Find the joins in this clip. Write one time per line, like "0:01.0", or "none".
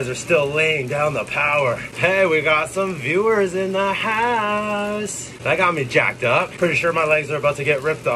0:01.9
0:05.3
0:06.5